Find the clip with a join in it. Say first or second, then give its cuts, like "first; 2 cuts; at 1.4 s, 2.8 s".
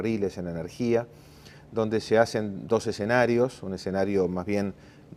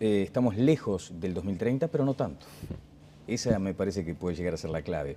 first; 1 cut; at 2.6 s